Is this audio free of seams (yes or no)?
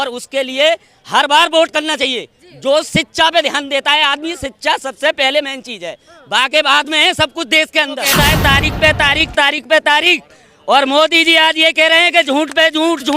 no